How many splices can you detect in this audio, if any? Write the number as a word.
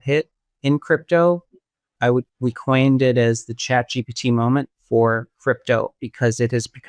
one